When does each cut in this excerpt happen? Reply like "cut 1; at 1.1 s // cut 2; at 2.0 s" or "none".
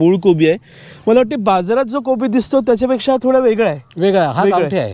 none